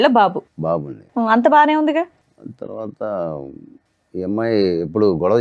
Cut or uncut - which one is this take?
uncut